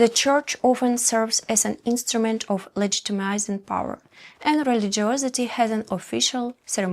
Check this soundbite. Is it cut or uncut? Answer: uncut